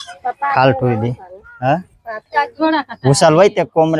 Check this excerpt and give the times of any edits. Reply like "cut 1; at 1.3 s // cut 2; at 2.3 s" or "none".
cut 1; at 2.3 s